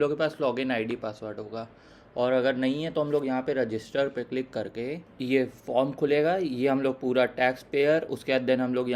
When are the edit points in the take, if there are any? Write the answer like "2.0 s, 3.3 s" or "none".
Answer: 5.1 s